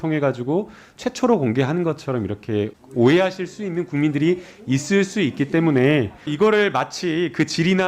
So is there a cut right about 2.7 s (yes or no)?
yes